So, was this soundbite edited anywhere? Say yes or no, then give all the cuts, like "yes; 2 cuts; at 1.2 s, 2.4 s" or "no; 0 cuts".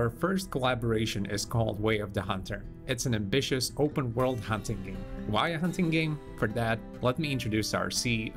yes; 1 cut; at 4.2 s